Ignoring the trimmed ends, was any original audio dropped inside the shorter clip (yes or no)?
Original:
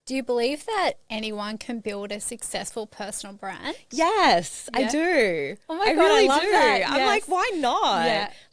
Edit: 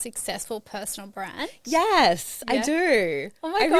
no